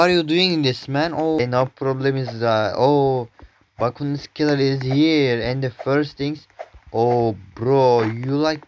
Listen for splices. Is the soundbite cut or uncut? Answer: cut